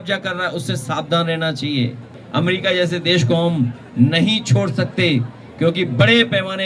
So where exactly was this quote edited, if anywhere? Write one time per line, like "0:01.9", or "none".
0:02.2